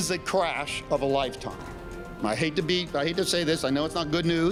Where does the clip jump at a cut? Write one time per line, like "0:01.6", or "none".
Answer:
none